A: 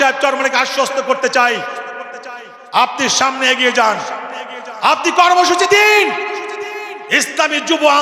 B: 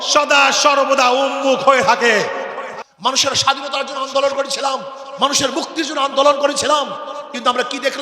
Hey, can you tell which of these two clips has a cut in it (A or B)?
B